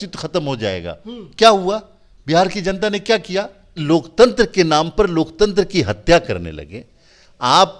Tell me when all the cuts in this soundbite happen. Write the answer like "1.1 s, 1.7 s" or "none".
3.8 s